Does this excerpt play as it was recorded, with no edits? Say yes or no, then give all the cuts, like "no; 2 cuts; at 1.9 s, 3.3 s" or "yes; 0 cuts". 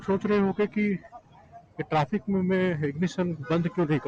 yes; 0 cuts